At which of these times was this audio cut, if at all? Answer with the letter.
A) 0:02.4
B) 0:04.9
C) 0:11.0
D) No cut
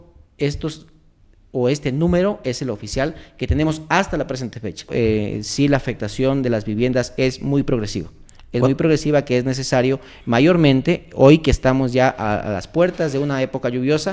B